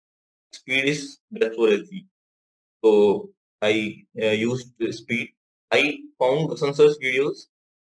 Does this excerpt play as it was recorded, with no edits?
yes; 0 cuts

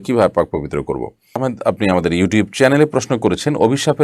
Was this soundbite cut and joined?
yes; 1 cut; at 1.2 s

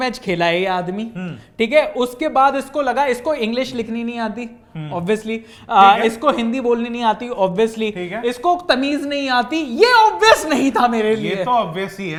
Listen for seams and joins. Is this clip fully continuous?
yes; 0 cuts

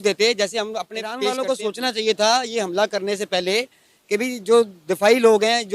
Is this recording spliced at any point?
yes; 1 cut; at 1.3 s

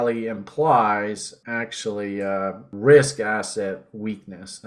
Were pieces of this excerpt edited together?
yes; 2 cuts; at 1.3 s, 2.7 s

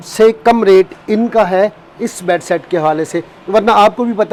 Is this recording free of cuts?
yes; 0 cuts

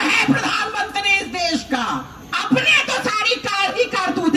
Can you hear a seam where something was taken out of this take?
yes; 1 cut; at 2.2 s

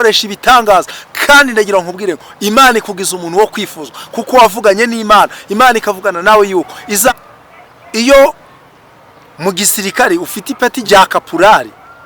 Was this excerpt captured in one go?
no; 2 cuts; at 7.1 s, 10.8 s

